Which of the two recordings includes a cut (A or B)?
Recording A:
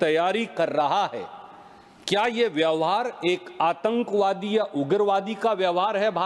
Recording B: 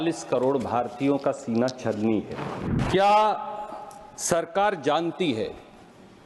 B